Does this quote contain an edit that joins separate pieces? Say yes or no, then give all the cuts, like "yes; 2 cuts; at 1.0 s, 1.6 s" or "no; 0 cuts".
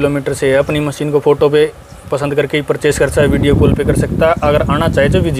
no; 0 cuts